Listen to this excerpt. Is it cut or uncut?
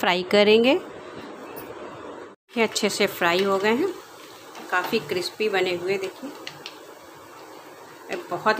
cut